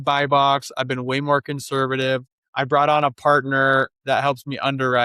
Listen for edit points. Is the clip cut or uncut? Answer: cut